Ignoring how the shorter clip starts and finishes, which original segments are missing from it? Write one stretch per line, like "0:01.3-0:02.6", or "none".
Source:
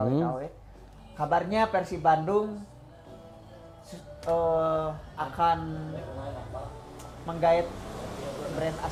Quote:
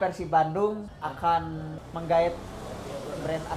0:02.6-0:05.1
0:05.9-0:07.1